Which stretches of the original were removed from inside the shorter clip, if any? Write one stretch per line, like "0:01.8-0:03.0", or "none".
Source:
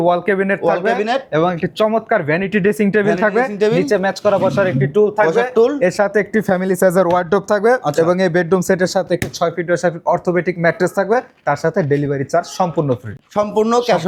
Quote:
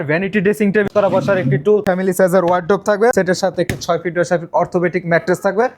0:03.1-0:04.2
0:05.1-0:06.5
0:07.8-0:08.7